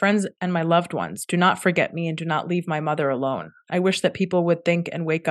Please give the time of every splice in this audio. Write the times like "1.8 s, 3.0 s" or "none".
none